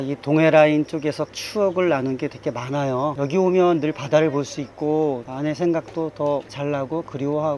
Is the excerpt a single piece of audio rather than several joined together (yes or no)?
no